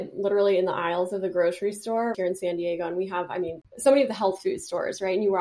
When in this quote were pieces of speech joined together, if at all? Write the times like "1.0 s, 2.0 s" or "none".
2.2 s, 3.6 s